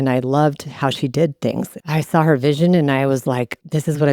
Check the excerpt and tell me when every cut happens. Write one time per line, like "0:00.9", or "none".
0:01.7